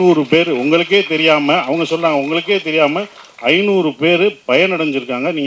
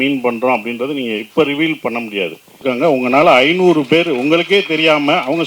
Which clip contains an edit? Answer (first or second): second